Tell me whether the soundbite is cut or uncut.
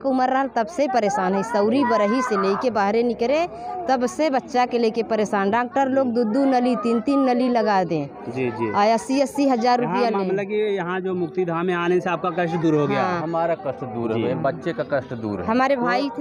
uncut